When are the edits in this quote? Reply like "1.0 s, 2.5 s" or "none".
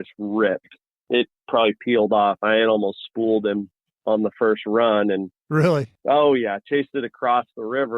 1.0 s, 5.9 s